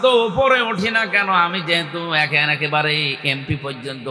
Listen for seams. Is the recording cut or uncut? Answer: uncut